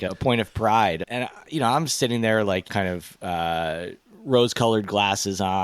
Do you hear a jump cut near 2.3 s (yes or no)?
no